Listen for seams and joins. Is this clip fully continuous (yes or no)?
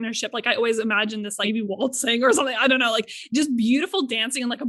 yes